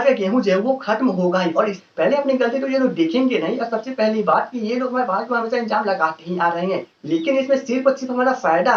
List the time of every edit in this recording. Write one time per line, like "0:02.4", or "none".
0:01.8
0:06.9